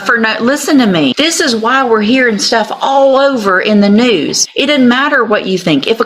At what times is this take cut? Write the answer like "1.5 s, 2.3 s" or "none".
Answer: 1.1 s, 4.4 s